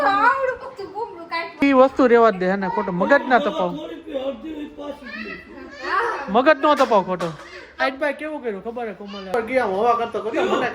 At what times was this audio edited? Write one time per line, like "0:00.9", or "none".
0:01.6
0:09.3